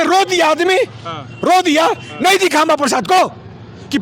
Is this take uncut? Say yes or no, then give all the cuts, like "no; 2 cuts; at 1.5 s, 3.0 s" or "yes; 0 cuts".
yes; 0 cuts